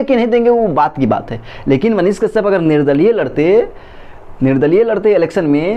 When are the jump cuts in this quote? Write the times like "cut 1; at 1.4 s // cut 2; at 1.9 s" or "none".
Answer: none